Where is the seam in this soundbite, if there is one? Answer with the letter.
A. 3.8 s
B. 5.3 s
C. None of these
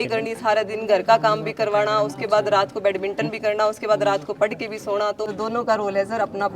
B